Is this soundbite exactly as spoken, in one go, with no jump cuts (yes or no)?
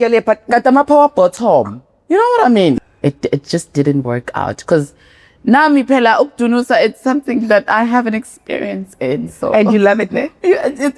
no